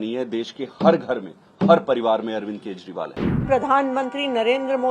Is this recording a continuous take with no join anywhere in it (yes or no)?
no